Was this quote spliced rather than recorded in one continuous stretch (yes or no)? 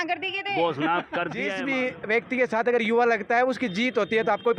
yes